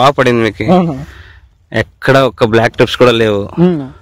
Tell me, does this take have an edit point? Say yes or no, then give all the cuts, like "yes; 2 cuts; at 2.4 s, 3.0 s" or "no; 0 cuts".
no; 0 cuts